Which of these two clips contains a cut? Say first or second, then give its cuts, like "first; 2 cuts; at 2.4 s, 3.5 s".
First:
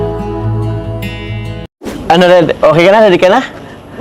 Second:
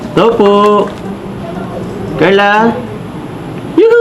first; 1 cut; at 1.6 s